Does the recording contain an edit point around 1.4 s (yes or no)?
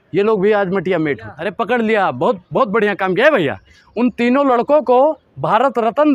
yes